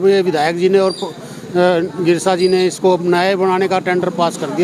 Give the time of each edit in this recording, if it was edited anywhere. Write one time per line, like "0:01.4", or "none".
none